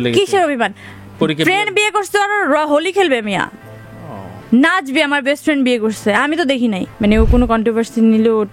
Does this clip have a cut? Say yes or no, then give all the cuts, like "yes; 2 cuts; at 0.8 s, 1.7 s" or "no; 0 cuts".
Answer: yes; 1 cut; at 6.9 s